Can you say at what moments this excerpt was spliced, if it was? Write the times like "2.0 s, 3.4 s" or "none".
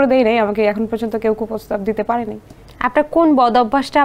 none

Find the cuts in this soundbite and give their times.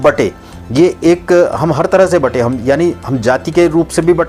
none

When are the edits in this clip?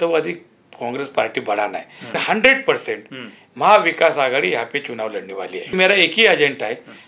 2.2 s, 5.7 s

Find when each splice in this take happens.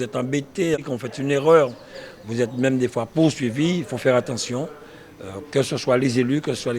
none

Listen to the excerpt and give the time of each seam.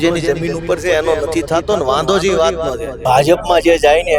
2.9 s

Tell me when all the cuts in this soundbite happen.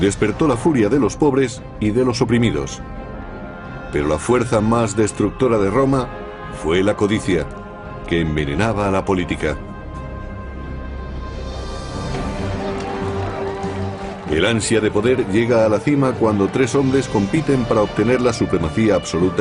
none

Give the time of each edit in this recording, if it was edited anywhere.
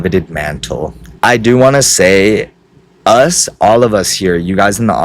1.0 s

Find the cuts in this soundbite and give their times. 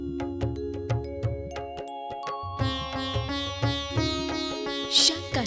2.7 s

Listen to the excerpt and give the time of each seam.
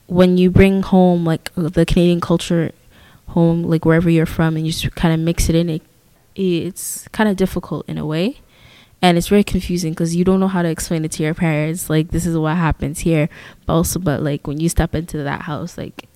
none

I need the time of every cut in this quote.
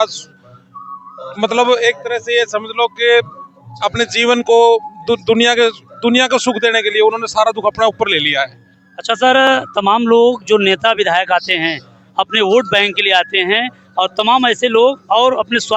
none

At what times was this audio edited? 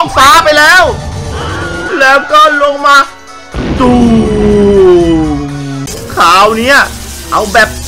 1.8 s, 5.9 s

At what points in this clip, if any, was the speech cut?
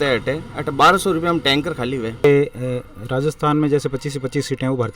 2.1 s

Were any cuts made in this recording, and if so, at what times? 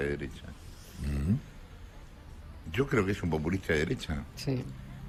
none

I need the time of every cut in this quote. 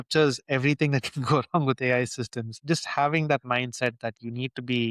2.6 s

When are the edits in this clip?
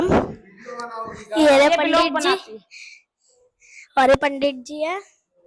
none

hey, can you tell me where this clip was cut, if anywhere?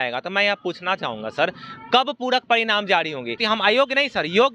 3.4 s

